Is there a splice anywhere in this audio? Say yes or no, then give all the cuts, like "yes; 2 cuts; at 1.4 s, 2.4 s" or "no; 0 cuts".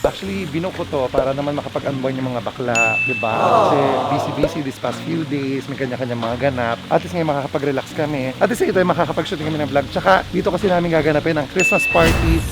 no; 0 cuts